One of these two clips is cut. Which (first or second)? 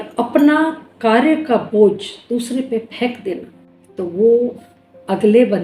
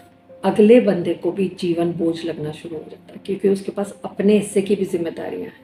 first